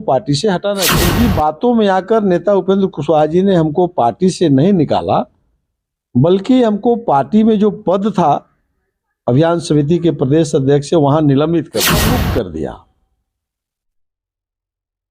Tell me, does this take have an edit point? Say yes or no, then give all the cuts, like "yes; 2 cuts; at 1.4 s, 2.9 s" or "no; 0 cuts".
yes; 2 cuts; at 1.0 s, 12.0 s